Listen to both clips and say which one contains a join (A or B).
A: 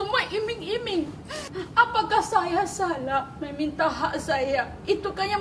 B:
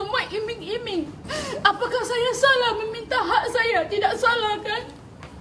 A